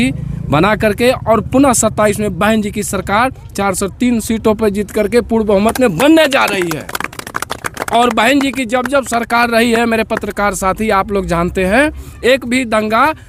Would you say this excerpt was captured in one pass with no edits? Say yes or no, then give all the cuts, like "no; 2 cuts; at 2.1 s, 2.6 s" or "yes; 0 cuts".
yes; 0 cuts